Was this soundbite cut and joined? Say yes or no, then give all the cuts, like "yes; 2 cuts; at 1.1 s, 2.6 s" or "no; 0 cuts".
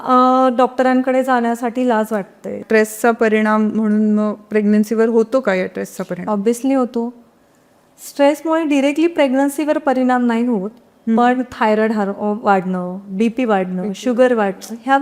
yes; 1 cut; at 2.6 s